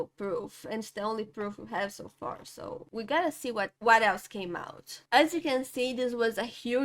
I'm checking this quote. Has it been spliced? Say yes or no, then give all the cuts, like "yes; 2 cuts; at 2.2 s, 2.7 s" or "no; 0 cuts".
yes; 1 cut; at 4.9 s